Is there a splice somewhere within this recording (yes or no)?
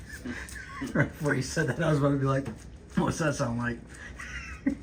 no